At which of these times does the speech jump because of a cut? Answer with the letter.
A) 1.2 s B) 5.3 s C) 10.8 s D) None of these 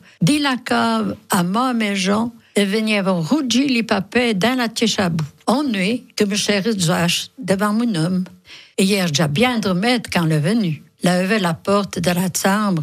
B